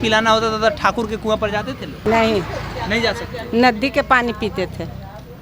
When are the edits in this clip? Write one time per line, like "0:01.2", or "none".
0:02.0